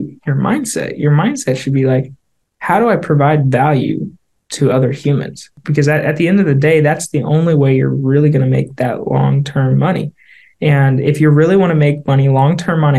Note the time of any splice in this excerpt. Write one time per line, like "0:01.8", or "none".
0:05.6